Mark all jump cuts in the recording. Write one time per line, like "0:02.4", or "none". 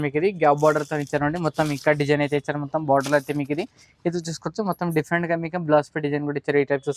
none